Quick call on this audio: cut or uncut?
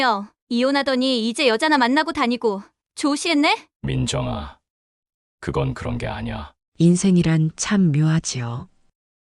cut